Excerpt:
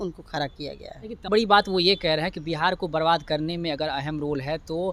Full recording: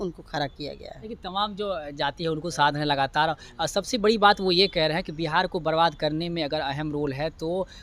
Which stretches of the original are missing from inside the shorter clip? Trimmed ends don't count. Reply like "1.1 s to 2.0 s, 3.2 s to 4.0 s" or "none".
1.3 s to 4.0 s

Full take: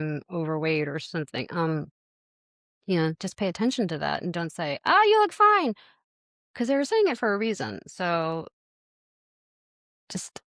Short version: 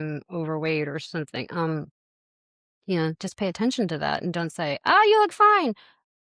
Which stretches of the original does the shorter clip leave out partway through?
none

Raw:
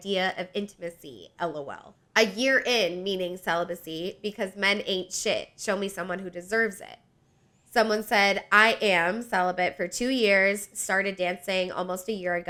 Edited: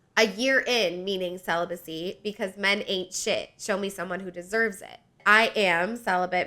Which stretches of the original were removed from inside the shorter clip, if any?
7.2 s to 8.4 s

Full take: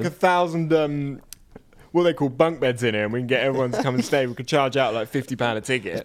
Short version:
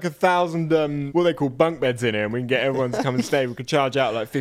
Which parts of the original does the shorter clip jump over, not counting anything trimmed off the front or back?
1.0 s to 1.8 s

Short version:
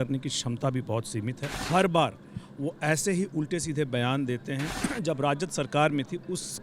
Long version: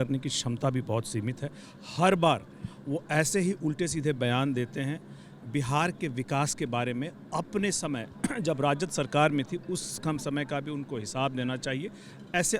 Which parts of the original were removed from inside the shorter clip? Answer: 1.5 s to 1.8 s, 5.0 s to 8.1 s

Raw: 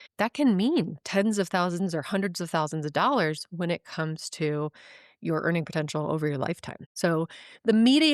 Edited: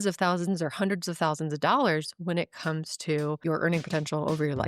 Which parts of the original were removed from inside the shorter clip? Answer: 4.7 s to 5.2 s

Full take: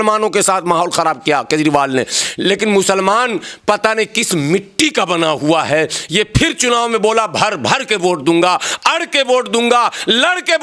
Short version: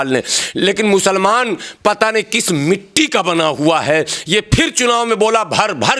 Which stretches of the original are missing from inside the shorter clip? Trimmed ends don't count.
none

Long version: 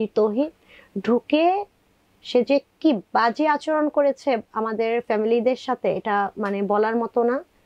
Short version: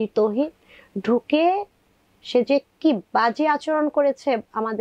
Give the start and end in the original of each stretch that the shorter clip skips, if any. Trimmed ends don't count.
none

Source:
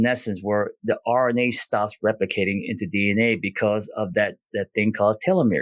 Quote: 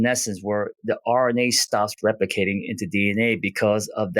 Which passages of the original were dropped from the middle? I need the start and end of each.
none

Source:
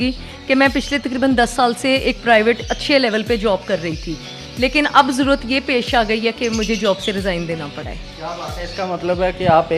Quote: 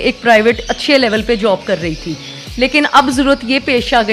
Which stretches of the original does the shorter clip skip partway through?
none

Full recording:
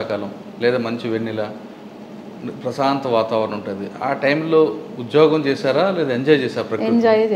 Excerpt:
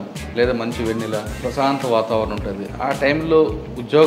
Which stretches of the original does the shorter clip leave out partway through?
1.6 s to 2.6 s

